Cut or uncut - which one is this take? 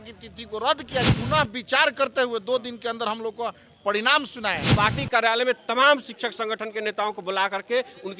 cut